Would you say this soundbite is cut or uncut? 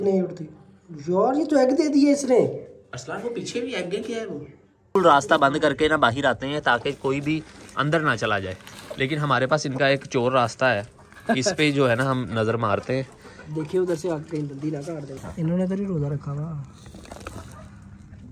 cut